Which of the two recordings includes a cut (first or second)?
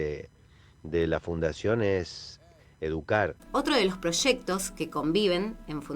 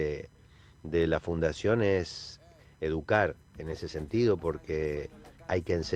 first